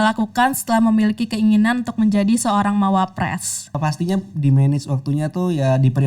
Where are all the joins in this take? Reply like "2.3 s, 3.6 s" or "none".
3.8 s